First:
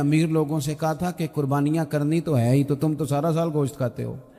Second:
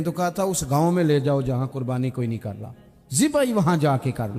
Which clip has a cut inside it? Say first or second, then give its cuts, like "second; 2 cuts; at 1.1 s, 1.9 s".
second; 1 cut; at 3.2 s